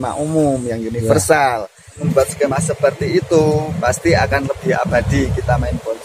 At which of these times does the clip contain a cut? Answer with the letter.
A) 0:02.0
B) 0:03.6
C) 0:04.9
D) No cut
A